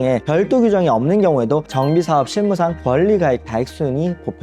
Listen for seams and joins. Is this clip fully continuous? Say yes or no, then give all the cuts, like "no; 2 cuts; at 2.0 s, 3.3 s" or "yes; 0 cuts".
yes; 0 cuts